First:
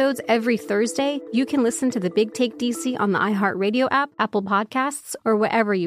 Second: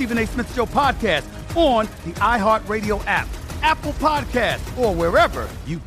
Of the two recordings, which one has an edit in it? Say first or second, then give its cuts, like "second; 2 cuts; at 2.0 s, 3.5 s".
first; 2 cuts; at 1.2 s, 4.1 s